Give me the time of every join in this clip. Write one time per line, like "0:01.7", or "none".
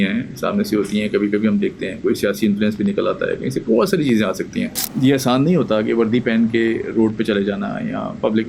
0:04.8

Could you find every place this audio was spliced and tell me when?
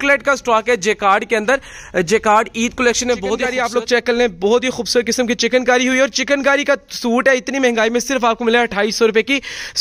0:03.5

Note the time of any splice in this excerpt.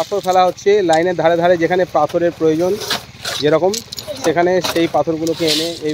none

